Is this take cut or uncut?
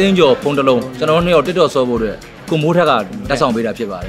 cut